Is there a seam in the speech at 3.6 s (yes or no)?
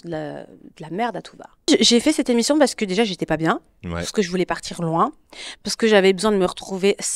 no